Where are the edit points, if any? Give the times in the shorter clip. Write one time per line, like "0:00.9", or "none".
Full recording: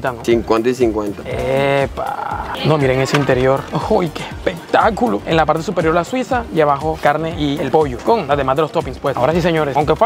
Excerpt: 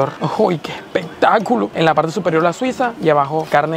none